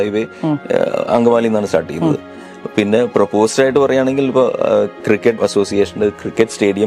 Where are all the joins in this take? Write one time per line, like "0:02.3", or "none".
0:05.3